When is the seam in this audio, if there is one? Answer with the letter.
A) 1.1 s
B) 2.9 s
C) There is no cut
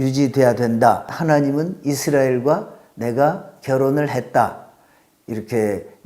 A